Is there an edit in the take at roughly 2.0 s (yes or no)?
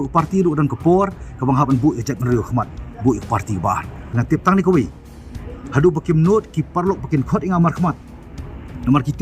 no